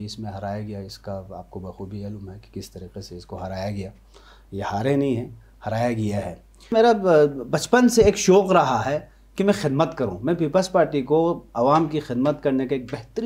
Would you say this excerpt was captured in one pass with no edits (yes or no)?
no